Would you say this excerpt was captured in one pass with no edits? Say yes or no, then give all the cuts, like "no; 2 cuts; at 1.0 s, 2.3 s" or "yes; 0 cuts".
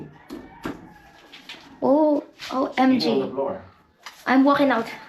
yes; 0 cuts